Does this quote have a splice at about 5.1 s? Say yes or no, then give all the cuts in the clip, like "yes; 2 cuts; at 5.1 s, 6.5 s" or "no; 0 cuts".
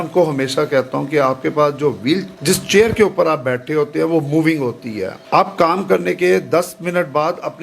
yes; 2 cuts; at 2.3 s, 5.1 s